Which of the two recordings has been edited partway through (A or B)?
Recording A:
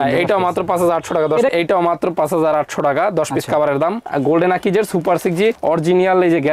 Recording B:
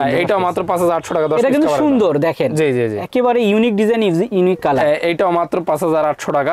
A